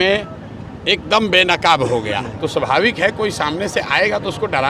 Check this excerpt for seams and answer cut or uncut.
cut